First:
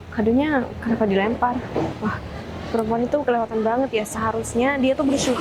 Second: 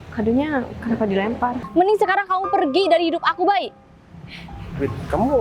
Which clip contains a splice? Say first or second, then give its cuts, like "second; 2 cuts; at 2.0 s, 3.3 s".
second; 1 cut; at 1.6 s